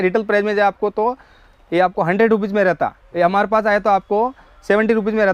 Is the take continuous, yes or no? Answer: yes